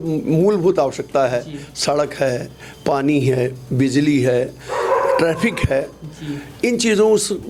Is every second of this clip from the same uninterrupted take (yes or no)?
yes